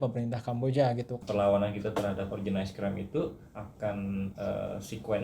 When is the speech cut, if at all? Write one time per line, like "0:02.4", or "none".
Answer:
0:01.2